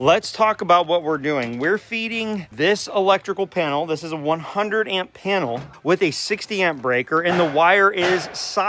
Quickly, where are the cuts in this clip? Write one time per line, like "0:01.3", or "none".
0:02.5
0:05.7